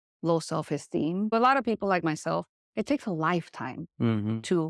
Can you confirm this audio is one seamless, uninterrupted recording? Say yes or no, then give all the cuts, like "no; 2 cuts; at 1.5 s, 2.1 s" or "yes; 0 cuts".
no; 1 cut; at 1.3 s